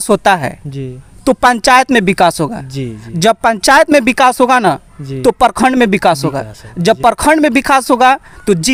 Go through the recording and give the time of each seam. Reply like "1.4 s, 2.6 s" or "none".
none